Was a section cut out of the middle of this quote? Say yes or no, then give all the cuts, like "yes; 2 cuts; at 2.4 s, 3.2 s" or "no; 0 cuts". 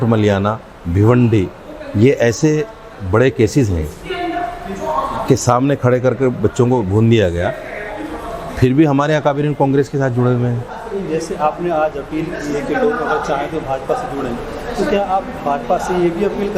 yes; 1 cut; at 10.7 s